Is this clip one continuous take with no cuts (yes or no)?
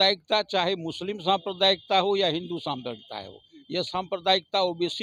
yes